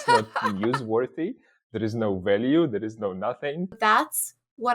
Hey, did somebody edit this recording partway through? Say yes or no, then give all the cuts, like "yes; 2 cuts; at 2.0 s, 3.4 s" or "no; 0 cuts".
yes; 1 cut; at 3.8 s